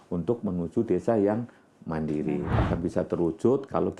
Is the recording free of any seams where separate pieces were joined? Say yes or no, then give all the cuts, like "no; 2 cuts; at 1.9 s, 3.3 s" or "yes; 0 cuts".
no; 1 cut; at 2.5 s